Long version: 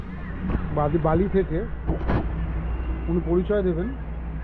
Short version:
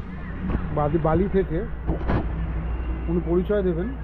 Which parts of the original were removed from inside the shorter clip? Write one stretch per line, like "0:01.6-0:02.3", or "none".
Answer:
none